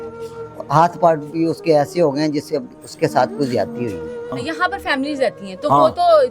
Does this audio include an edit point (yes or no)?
yes